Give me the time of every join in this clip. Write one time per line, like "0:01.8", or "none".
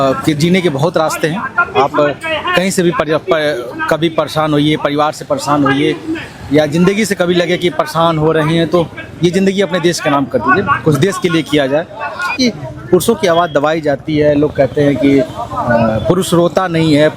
0:12.3